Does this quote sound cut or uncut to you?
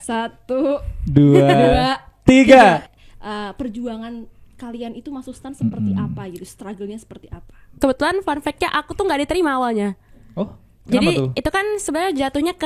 cut